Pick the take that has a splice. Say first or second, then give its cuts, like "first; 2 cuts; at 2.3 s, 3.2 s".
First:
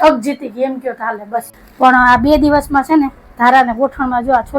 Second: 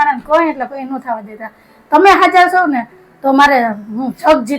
first; 1 cut; at 1.6 s